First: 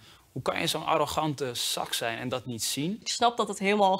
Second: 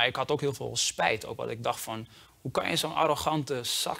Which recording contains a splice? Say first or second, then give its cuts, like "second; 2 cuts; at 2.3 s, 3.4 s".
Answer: first; 1 cut; at 3.1 s